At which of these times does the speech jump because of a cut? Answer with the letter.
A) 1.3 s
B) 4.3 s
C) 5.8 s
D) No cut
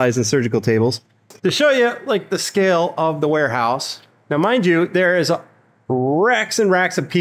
A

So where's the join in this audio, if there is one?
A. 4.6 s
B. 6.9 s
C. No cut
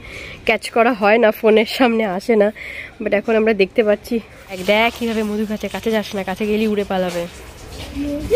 A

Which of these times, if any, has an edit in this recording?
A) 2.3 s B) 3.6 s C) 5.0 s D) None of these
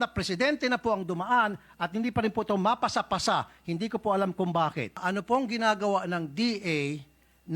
C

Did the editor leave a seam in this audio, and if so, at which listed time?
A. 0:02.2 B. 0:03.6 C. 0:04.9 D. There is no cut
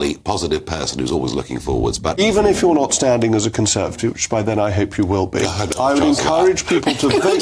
A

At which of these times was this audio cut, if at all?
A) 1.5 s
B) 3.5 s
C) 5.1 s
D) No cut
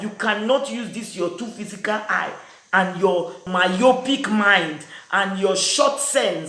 B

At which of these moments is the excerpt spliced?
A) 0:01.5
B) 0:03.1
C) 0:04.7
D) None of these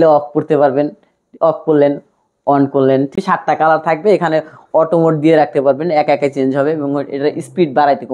B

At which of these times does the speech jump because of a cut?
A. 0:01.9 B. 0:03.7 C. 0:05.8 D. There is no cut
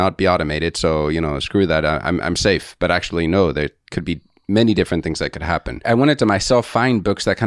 C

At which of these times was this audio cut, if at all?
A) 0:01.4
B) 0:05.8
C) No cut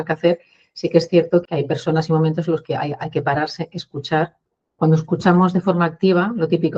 A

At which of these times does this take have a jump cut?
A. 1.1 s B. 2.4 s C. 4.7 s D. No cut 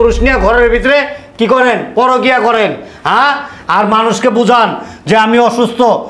D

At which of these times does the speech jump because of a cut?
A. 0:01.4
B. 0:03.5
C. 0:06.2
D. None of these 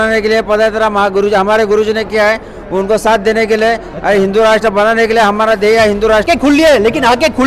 C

